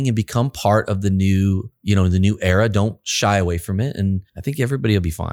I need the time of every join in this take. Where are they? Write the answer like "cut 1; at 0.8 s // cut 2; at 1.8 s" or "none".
cut 1; at 1.7 s // cut 2; at 4.3 s